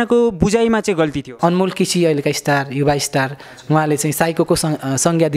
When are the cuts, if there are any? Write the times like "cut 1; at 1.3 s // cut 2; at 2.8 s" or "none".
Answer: cut 1; at 1.3 s // cut 2; at 3.5 s